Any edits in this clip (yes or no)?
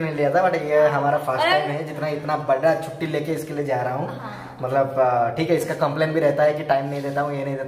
no